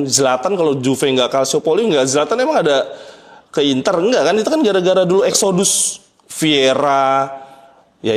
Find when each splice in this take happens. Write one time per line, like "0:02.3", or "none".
none